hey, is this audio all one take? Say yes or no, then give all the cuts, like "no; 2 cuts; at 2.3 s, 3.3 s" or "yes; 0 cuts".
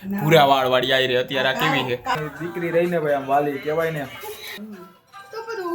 no; 2 cuts; at 2.2 s, 4.5 s